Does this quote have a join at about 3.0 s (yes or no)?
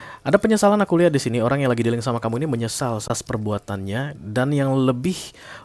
yes